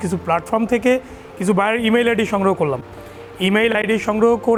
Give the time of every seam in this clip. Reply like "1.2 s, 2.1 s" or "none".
none